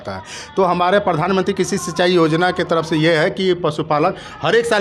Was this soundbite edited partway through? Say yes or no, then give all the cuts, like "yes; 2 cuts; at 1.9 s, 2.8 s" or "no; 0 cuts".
no; 0 cuts